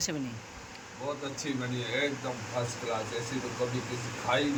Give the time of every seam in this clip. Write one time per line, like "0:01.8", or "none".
none